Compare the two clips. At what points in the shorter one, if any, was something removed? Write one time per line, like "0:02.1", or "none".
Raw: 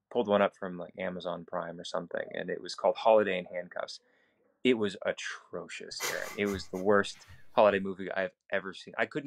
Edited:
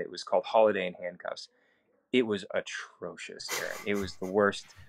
none